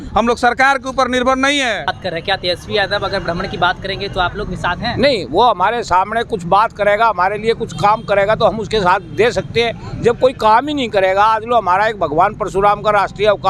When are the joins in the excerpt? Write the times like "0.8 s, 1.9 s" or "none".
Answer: 2.0 s